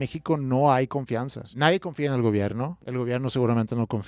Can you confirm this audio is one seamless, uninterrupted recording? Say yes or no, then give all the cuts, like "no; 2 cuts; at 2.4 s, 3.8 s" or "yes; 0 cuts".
no; 2 cuts; at 1.4 s, 2.8 s